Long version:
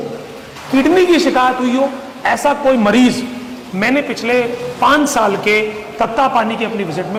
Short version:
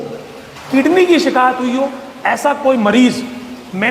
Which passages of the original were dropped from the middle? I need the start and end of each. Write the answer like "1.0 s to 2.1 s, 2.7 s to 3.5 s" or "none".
none